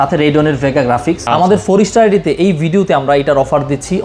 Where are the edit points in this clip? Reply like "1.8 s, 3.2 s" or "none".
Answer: 1.2 s